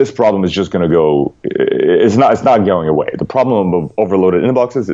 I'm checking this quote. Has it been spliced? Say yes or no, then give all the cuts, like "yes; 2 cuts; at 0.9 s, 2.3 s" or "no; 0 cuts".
no; 0 cuts